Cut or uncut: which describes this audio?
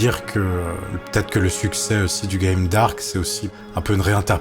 cut